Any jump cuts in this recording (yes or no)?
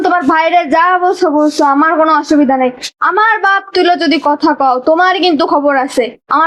no